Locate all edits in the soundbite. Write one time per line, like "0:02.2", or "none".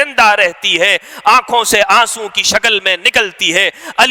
none